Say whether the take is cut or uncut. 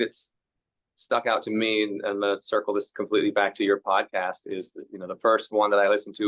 uncut